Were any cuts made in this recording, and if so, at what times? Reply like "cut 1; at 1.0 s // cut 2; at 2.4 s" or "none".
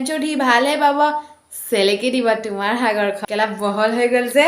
cut 1; at 3.2 s